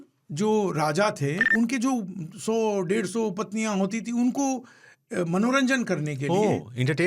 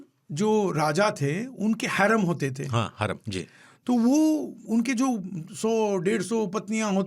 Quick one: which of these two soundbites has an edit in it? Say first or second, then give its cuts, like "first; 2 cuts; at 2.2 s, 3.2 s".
first; 1 cut; at 1.4 s